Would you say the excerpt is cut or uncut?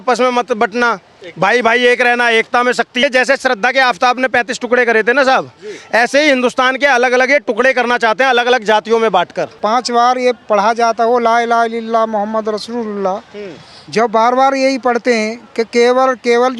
cut